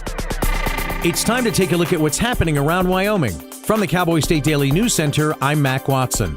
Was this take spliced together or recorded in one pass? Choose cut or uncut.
cut